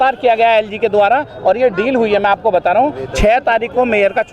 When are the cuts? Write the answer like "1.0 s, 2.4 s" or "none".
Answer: none